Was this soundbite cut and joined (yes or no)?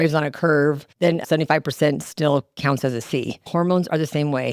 yes